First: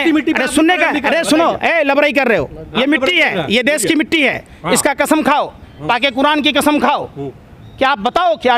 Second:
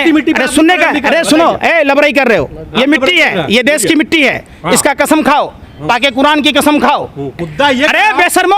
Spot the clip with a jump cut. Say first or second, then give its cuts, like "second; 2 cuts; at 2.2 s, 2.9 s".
second; 1 cut; at 7.4 s